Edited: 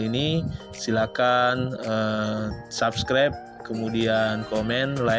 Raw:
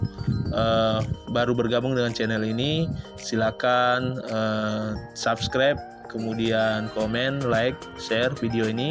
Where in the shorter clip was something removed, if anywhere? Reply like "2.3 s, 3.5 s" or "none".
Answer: none